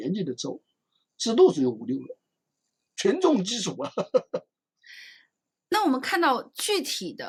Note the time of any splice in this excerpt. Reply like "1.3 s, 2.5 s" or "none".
none